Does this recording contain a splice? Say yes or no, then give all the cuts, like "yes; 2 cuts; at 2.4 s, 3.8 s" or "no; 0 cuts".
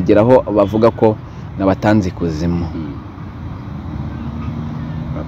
no; 0 cuts